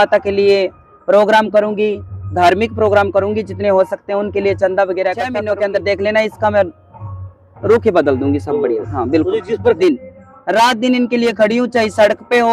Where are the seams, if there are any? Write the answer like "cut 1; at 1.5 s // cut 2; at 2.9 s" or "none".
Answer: cut 1; at 5.4 s // cut 2; at 9.8 s